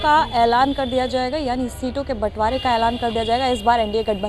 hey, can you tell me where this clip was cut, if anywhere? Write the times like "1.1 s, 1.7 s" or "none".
none